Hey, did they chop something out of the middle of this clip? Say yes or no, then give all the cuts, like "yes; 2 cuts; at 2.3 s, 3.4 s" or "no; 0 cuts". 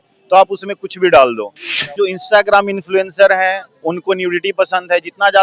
yes; 1 cut; at 2.0 s